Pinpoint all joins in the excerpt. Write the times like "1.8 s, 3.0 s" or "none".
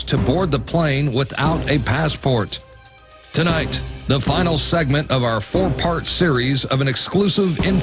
2.2 s